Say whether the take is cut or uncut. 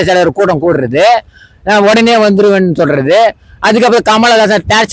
uncut